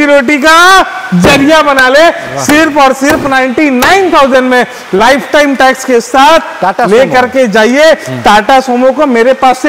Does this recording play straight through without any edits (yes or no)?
yes